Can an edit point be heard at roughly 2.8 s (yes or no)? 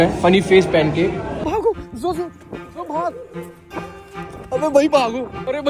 no